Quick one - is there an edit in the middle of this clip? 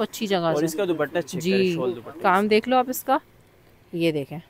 no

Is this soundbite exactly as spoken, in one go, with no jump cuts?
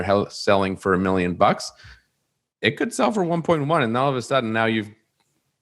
yes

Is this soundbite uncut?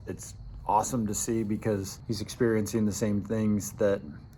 no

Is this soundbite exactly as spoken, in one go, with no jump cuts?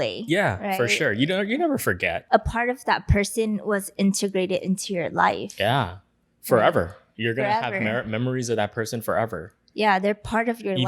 no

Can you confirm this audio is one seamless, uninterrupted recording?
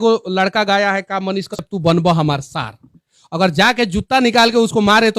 no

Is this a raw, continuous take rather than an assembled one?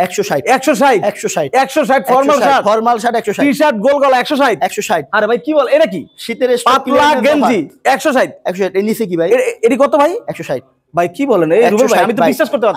yes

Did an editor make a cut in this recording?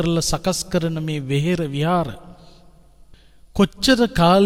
no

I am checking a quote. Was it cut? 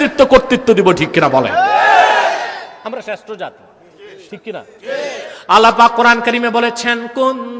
no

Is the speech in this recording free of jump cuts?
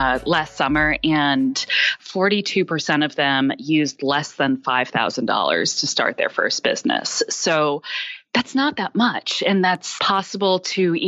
no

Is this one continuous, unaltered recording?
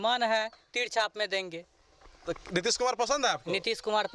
yes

